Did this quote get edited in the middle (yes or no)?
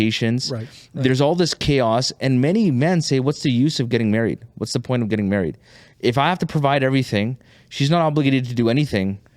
no